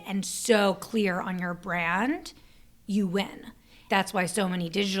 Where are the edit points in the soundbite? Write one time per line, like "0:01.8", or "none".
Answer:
0:03.9